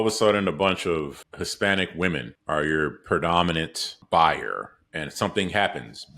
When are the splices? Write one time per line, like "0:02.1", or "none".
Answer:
0:01.2
0:02.3
0:04.0